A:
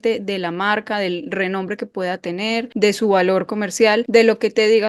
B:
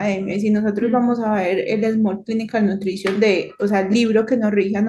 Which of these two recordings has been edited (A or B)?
A